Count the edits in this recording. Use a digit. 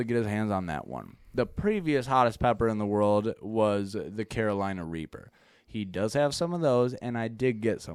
0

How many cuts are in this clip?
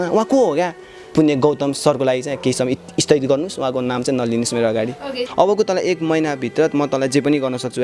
2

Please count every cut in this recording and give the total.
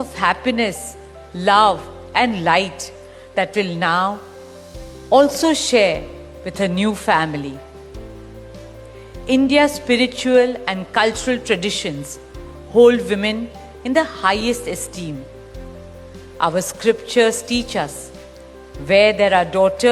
0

